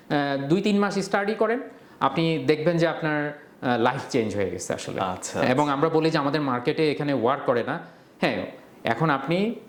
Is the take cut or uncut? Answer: uncut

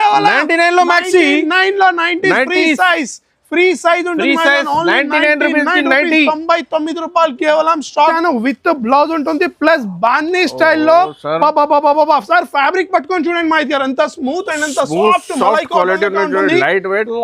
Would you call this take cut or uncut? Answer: cut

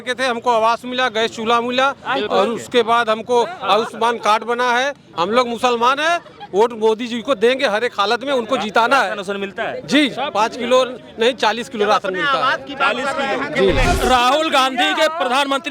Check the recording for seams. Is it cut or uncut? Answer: cut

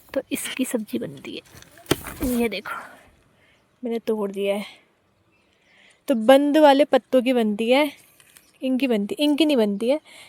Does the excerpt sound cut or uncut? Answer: uncut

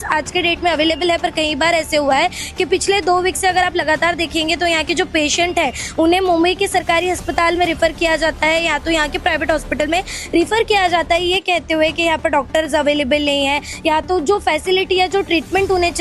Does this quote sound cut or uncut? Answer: uncut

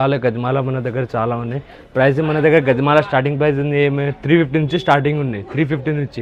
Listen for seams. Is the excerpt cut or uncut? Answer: uncut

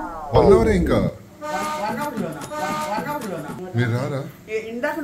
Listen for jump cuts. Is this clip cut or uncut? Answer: cut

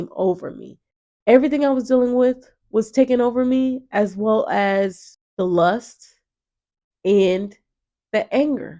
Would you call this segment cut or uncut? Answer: cut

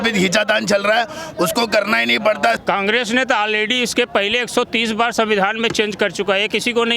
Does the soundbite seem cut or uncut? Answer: cut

